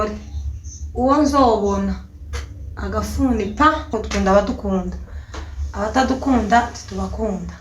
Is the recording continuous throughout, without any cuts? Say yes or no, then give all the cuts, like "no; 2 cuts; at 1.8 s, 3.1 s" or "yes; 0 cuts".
no; 1 cut; at 4.0 s